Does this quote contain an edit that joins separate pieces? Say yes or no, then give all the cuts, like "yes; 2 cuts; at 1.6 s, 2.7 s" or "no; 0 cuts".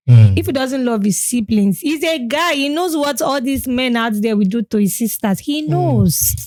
no; 0 cuts